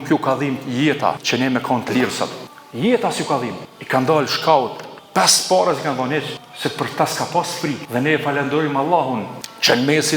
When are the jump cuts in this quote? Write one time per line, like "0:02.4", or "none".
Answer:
0:01.2